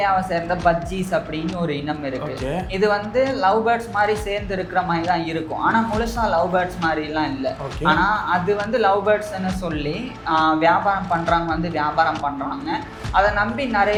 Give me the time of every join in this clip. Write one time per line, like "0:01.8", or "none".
none